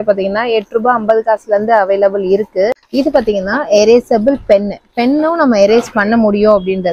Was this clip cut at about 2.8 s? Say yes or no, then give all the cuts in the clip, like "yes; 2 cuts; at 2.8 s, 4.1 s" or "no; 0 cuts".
yes; 1 cut; at 2.8 s